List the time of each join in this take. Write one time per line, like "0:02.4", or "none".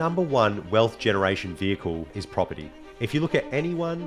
0:02.2